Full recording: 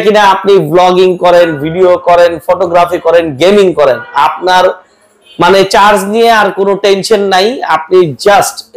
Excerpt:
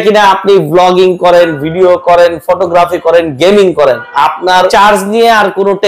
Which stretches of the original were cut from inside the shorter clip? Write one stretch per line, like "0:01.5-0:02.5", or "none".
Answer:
0:04.7-0:05.7

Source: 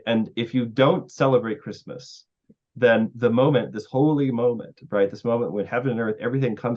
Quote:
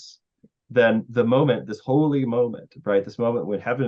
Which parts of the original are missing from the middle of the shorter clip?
none

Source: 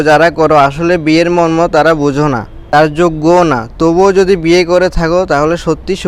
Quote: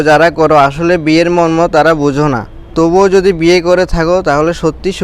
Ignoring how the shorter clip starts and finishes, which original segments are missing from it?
0:02.6-0:03.6

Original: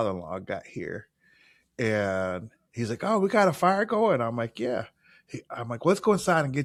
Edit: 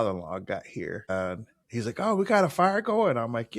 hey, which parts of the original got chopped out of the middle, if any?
0:01.1-0:02.1

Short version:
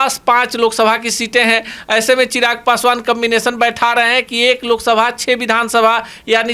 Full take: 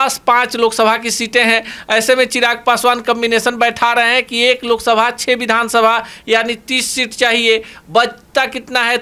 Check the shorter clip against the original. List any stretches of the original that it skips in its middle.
none

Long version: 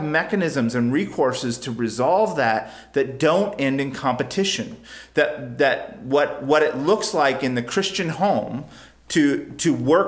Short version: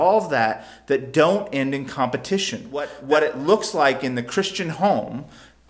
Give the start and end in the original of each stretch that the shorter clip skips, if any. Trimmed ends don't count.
0:05.0-0:06.4

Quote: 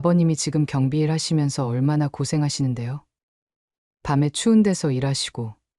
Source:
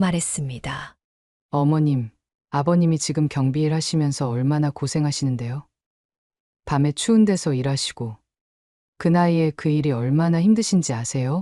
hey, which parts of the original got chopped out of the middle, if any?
none

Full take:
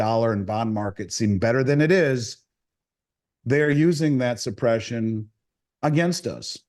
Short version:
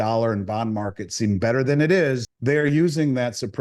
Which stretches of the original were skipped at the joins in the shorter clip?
0:02.3-0:03.3

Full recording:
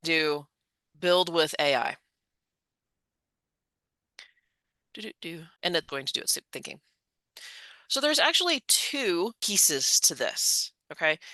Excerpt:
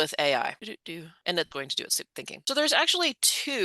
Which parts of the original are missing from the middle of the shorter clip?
0:02.5-0:05.5
0:06.7-0:07.8

